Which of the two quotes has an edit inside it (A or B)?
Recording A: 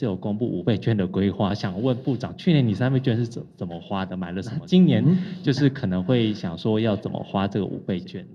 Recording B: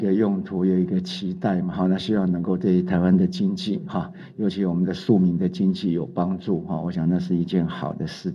A